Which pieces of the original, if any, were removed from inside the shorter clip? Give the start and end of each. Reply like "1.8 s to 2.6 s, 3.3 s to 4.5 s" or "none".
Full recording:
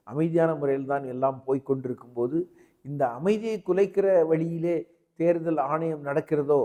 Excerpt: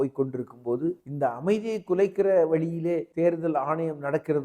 2.6 s to 2.8 s, 4.9 s to 5.1 s